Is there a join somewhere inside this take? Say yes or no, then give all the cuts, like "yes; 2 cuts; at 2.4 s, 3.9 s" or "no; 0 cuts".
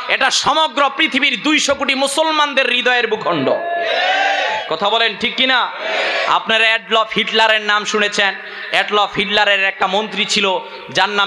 no; 0 cuts